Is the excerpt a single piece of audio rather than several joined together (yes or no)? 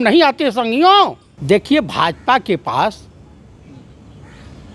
no